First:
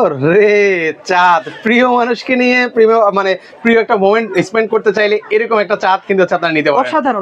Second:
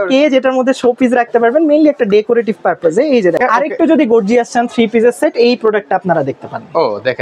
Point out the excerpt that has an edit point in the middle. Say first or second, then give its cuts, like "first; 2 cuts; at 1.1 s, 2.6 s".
second; 1 cut; at 3.4 s